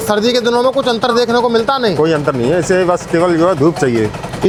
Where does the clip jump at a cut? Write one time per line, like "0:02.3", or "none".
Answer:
none